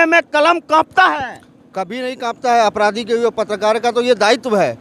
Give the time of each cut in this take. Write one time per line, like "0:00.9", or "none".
none